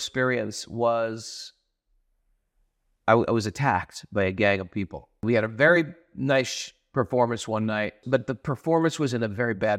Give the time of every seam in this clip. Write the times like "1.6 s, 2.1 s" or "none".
5.2 s, 8.0 s